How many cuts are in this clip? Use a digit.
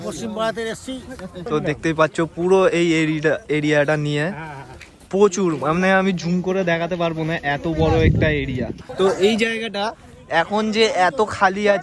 2